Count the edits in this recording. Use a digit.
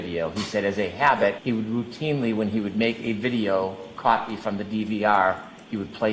1